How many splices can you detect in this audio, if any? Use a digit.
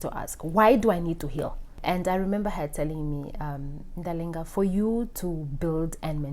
1